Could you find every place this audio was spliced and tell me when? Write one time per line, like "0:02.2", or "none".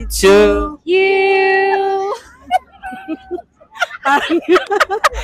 none